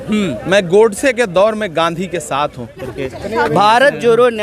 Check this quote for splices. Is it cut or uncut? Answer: cut